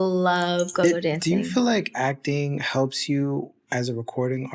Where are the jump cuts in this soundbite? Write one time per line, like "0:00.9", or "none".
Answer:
0:01.0